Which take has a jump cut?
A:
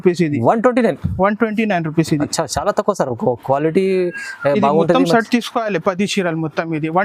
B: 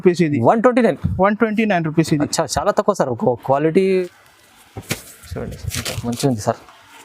B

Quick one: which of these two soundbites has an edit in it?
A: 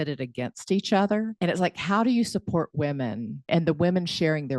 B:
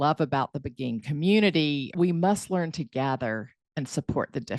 A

